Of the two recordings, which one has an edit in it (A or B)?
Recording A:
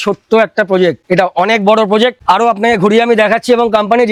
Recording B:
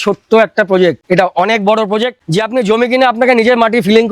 B